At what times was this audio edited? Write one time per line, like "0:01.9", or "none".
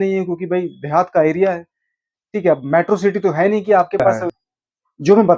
0:04.2